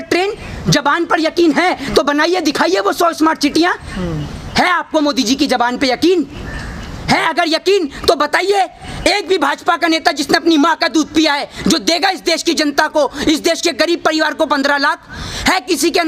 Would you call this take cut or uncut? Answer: uncut